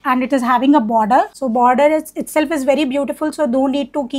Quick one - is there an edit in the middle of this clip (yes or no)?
yes